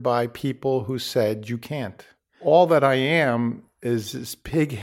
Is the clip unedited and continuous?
no; 1 cut; at 2.4 s

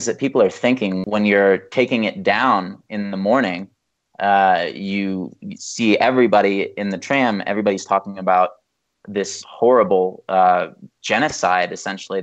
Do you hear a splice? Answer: yes; 1 cut; at 1.0 s

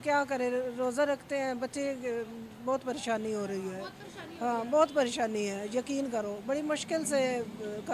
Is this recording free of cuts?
yes; 0 cuts

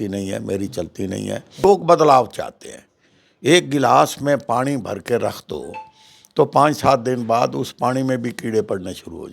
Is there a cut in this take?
yes; 1 cut; at 1.6 s

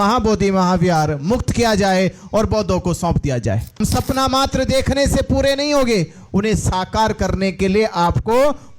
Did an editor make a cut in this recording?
yes; 1 cut; at 3.8 s

